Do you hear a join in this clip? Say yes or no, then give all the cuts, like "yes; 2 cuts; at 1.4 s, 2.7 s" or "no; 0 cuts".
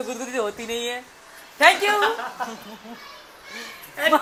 no; 0 cuts